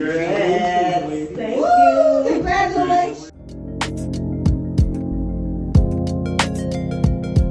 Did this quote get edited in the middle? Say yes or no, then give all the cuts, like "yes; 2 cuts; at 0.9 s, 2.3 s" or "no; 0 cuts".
no; 0 cuts